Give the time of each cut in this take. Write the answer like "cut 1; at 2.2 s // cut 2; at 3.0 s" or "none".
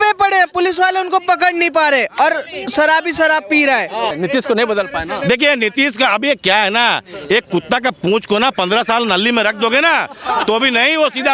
cut 1; at 4.1 s